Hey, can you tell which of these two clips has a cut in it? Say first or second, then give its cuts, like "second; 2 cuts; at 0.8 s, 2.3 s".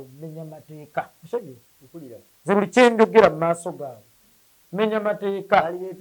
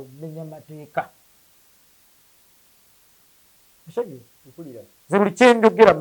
first; 1 cut; at 1.2 s